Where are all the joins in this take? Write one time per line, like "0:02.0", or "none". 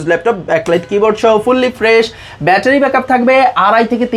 none

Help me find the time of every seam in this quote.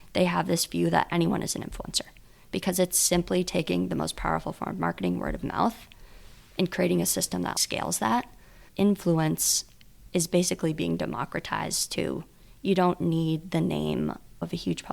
0:07.6
0:08.6

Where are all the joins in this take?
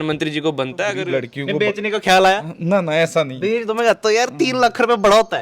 0:01.0

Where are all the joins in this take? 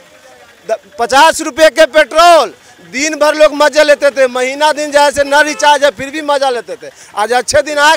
none

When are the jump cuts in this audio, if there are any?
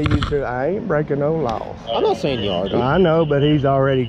none

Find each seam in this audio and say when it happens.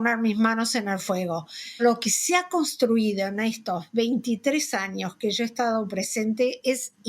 0:01.8

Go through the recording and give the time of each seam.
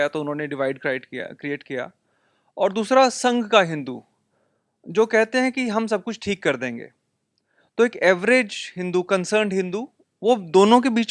none

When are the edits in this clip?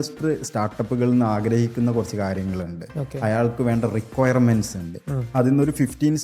0:05.3

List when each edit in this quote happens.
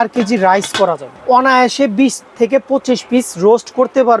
0:01.1

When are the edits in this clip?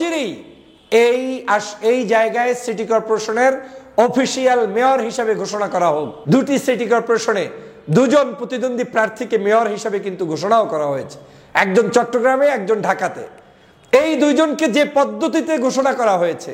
0:06.1

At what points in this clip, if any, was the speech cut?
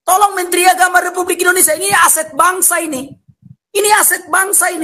none

